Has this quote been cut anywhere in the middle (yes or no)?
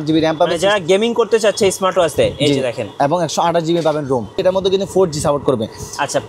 yes